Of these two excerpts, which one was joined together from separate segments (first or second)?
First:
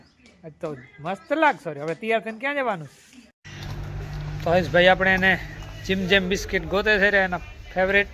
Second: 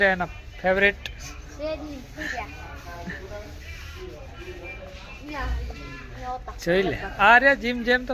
first